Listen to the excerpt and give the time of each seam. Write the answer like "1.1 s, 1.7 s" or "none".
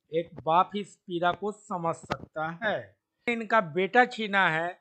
3.3 s